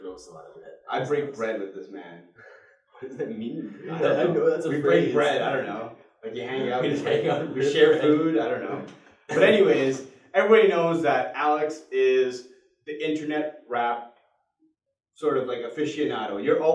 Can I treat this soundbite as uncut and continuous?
yes; 0 cuts

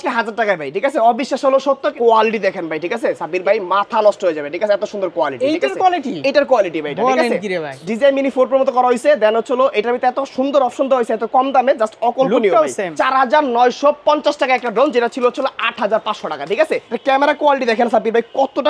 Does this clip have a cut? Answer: yes; 4 cuts; at 1.9 s, 7.7 s, 13.0 s, 16.9 s

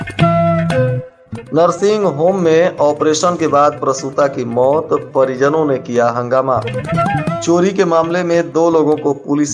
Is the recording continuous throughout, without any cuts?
no; 1 cut; at 1.1 s

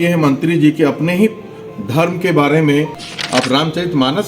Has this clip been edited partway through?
yes; 1 cut; at 3.0 s

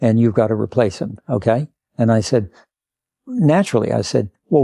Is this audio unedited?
yes; 0 cuts

